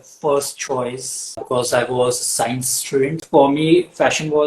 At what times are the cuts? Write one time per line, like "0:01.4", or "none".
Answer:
0:01.4
0:03.2